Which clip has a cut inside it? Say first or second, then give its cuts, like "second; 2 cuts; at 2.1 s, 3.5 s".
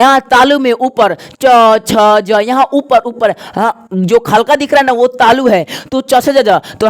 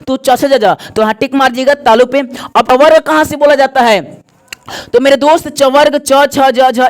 second; 1 cut; at 2.7 s